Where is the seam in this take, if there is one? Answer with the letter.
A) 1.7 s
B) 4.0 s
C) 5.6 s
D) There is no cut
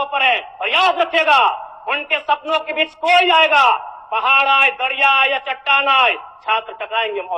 D